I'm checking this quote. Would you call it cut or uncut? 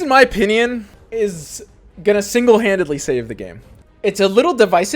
cut